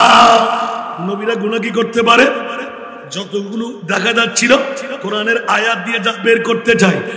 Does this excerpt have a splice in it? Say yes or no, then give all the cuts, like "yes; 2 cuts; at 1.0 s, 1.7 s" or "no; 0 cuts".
yes; 1 cut; at 0.9 s